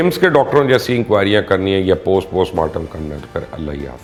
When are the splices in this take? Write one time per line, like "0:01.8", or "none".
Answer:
none

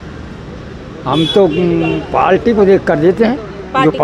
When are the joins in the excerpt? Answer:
none

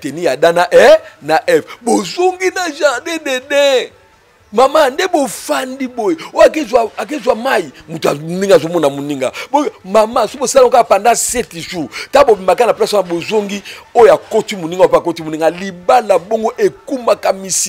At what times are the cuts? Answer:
none

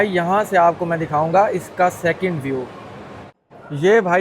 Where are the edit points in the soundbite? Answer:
0:03.2

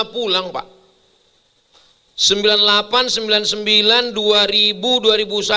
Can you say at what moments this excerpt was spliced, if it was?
none

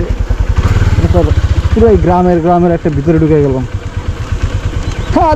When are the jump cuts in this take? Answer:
none

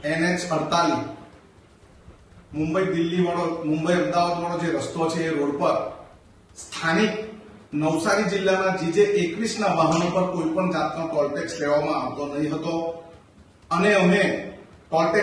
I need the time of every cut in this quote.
none

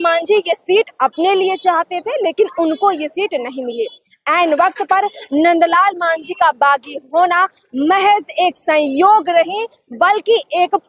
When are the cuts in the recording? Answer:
none

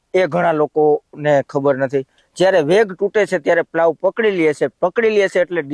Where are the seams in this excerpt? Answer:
0:02.2

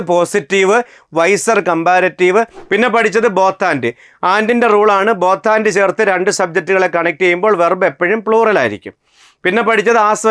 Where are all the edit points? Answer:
0:02.6

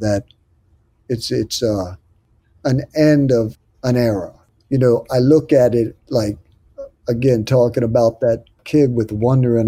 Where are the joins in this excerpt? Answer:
0:03.6
0:08.6

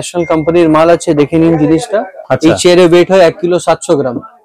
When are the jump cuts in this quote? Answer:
none

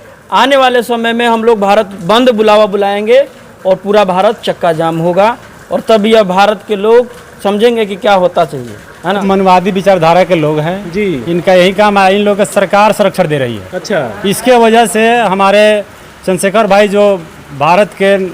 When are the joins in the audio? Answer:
0:09.2

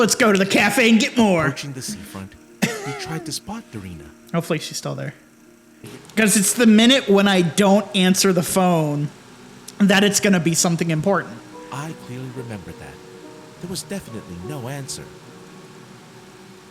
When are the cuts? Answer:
0:05.9

